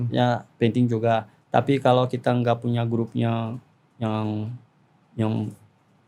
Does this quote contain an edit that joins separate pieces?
no; 0 cuts

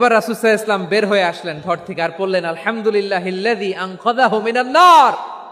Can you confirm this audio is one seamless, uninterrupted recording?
yes; 0 cuts

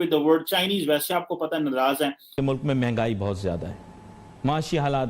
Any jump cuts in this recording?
yes; 2 cuts; at 2.2 s, 4.2 s

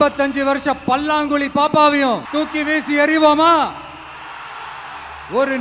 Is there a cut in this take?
yes; 1 cut; at 2.3 s

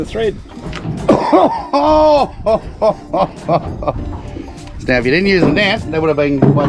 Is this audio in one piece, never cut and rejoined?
yes; 0 cuts

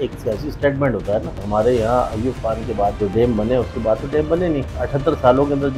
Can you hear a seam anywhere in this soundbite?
yes; 3 cuts; at 1.4 s, 3.0 s, 4.8 s

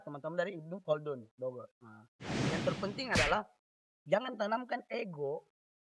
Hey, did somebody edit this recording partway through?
yes; 1 cut; at 2.5 s

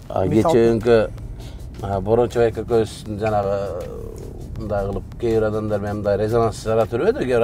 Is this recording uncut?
yes; 0 cuts

